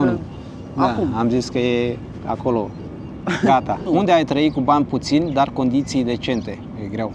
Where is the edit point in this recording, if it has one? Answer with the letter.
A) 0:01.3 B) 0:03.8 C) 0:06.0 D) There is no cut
B